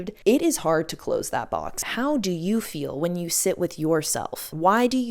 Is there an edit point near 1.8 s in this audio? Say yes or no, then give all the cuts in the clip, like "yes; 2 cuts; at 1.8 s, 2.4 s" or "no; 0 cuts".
yes; 1 cut; at 1.8 s